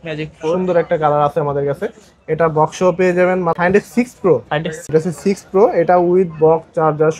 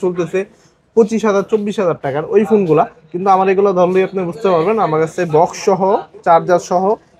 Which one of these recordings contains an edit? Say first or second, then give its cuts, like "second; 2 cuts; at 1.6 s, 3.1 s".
first; 2 cuts; at 3.6 s, 4.9 s